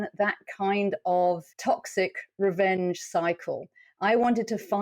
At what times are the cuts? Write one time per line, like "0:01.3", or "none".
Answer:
0:01.5